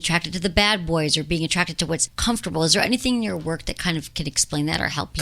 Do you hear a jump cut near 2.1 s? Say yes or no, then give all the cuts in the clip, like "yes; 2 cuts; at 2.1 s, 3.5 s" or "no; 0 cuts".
yes; 1 cut; at 2.1 s